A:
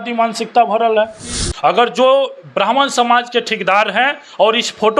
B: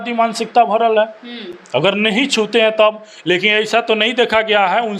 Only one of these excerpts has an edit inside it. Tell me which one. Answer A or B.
A